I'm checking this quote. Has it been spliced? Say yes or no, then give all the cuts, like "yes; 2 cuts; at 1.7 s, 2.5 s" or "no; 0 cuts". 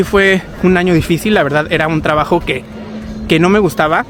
no; 0 cuts